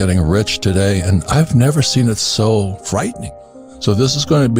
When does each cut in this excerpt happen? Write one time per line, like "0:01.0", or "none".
0:03.2